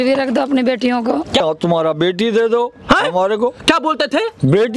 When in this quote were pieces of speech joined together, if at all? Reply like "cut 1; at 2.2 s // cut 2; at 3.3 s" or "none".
cut 1; at 1.4 s